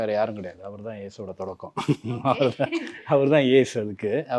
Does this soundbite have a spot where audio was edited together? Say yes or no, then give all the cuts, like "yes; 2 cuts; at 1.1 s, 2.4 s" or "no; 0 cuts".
no; 0 cuts